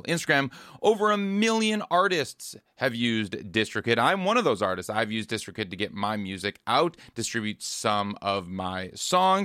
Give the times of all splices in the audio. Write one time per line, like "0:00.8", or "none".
none